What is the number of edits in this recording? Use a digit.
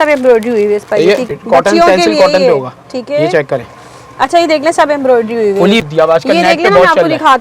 2